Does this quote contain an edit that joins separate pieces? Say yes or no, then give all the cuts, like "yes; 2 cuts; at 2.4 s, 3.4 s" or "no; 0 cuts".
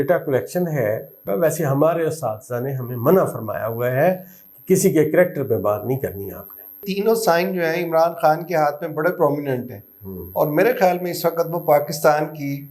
yes; 2 cuts; at 1.2 s, 6.9 s